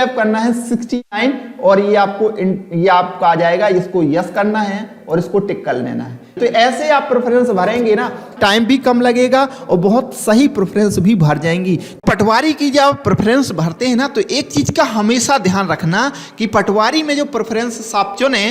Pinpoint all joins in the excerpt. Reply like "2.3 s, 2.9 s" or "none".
6.4 s, 12.0 s